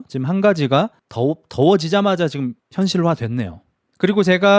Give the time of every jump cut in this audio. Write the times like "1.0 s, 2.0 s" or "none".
none

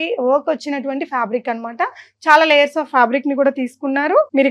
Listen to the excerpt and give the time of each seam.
none

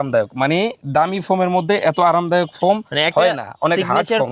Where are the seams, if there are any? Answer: none

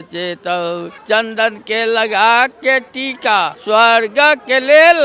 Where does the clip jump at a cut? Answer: 0.9 s, 3.6 s

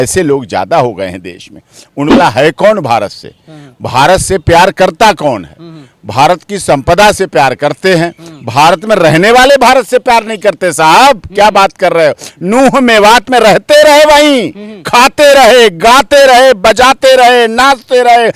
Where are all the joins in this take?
2.2 s

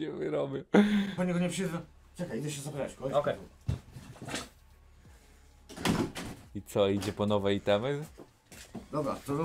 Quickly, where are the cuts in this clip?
none

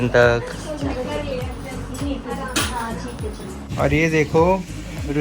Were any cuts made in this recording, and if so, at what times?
3.6 s

